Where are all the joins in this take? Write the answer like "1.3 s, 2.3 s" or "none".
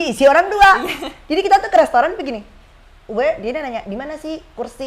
none